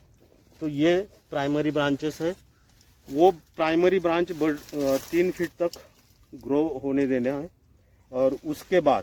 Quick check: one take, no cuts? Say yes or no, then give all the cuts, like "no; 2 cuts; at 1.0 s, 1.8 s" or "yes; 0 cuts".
yes; 0 cuts